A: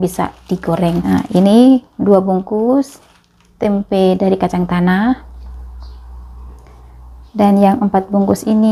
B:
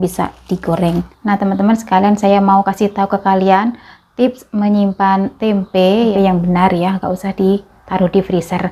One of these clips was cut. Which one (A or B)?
B